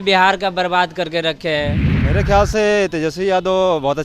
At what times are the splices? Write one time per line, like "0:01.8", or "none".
0:01.9